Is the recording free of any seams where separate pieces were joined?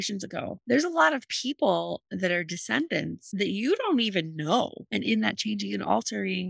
no; 1 cut; at 4.8 s

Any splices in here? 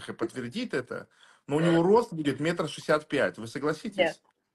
no; 0 cuts

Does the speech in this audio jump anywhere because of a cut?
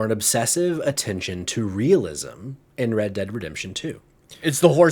no; 0 cuts

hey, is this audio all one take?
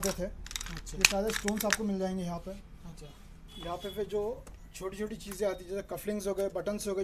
yes; 0 cuts

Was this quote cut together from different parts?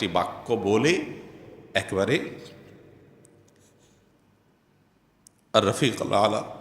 yes; 1 cut; at 3.6 s

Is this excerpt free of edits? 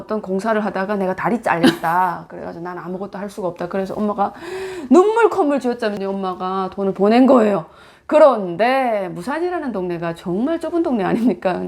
yes; 0 cuts

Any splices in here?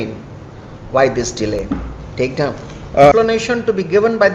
yes; 1 cut; at 3.1 s

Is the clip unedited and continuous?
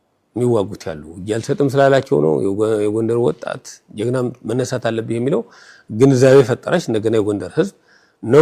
yes; 0 cuts

